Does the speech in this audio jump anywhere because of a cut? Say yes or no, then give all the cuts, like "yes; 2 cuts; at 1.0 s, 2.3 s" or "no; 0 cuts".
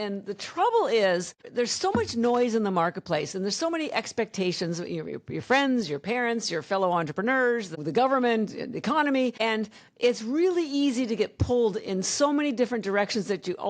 yes; 3 cuts; at 1.5 s, 7.7 s, 9.4 s